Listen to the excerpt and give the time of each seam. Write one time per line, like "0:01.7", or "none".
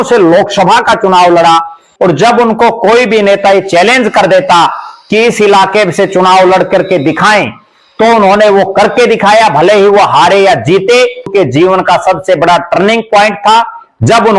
0:01.8
0:11.3